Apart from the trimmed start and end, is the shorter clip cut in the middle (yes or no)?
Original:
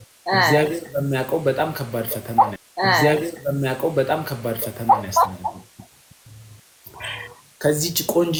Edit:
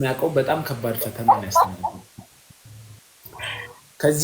yes